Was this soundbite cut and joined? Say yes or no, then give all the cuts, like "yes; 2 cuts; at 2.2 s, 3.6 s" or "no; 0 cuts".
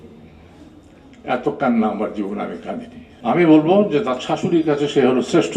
yes; 1 cut; at 3.2 s